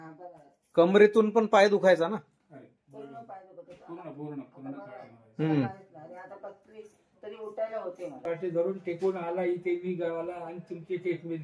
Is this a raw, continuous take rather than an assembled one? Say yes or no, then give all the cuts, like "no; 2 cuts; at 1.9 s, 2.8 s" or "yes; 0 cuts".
no; 1 cut; at 8.2 s